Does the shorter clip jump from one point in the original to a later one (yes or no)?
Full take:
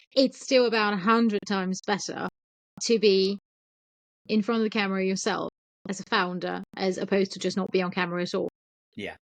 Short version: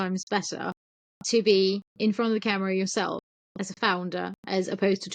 yes